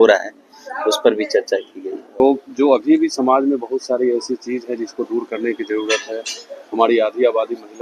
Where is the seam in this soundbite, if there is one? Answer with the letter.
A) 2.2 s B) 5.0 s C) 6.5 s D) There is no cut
A